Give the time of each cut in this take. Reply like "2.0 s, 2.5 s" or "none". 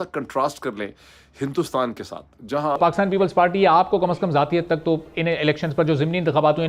2.8 s